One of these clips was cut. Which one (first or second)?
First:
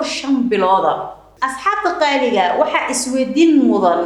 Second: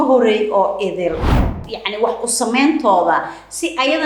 second